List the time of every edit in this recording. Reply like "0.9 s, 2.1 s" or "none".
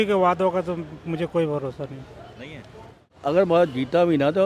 3.1 s